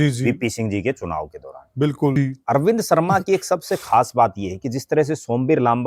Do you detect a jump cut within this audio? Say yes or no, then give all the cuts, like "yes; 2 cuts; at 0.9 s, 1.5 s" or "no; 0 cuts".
yes; 1 cut; at 2.2 s